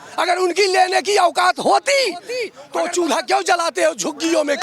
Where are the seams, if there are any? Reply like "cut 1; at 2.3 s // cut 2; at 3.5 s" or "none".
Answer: cut 1; at 2.6 s